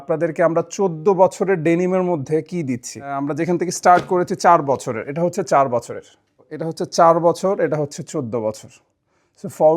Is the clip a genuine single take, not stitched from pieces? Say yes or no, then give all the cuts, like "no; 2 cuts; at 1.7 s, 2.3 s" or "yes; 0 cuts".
no; 2 cuts; at 3.3 s, 6.6 s